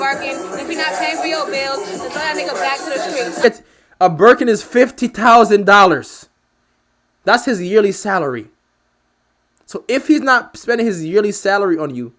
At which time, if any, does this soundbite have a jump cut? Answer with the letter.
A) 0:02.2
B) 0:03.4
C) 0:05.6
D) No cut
B